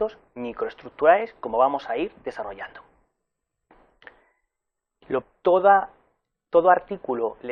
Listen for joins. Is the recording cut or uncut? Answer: uncut